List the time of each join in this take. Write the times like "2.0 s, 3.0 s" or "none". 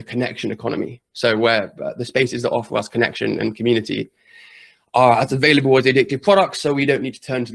none